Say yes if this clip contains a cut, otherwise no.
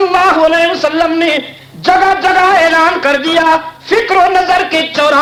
no